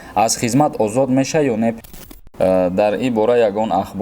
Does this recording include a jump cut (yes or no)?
yes